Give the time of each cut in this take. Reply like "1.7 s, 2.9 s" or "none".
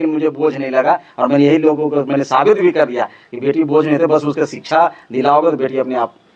none